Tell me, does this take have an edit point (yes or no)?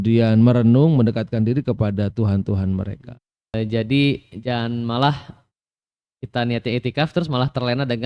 yes